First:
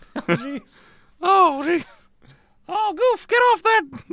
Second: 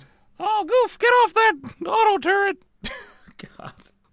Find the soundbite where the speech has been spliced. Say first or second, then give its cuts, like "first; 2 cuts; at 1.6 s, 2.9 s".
second; 1 cut; at 3.1 s